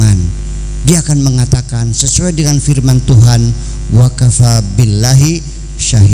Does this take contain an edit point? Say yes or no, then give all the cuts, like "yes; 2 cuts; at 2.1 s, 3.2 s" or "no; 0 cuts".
no; 0 cuts